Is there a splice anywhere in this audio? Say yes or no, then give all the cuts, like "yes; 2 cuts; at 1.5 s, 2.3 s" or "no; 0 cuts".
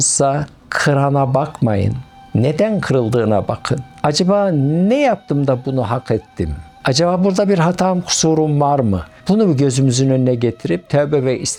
no; 0 cuts